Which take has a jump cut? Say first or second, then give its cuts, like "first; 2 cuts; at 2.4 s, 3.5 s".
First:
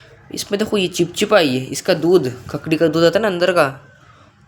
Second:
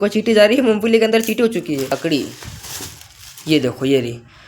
second; 1 cut; at 1.9 s